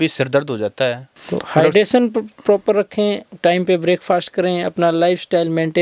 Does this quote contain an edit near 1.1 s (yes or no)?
yes